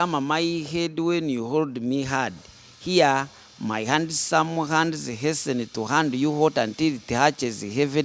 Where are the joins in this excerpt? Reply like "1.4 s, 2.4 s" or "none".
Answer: none